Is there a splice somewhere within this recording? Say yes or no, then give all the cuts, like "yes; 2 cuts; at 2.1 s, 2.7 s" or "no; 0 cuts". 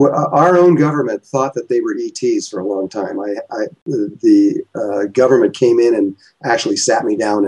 yes; 1 cut; at 1.1 s